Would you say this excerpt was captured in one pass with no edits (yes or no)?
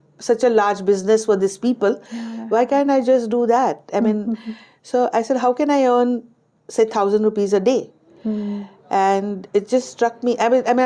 yes